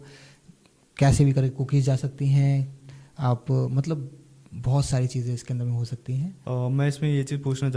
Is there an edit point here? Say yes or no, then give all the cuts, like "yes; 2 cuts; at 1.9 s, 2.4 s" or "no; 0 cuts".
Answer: yes; 1 cut; at 6.4 s